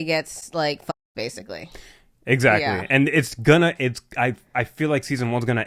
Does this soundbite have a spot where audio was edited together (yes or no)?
no